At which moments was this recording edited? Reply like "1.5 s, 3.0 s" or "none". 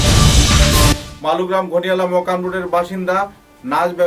none